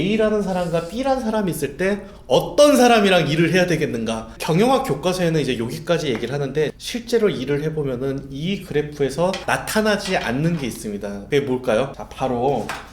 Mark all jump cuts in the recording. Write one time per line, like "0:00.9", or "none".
0:04.3
0:06.8
0:09.4
0:11.2
0:12.0